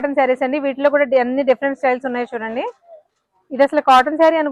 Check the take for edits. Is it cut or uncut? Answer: uncut